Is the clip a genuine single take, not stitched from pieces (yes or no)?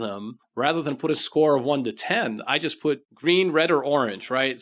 no